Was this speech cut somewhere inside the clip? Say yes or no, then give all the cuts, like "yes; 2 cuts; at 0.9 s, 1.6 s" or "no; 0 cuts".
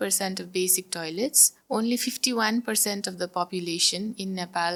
no; 0 cuts